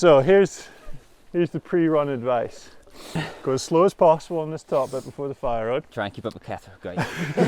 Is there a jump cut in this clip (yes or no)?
yes